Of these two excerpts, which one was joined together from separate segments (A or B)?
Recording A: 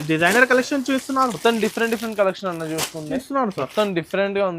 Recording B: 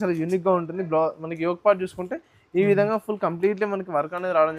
A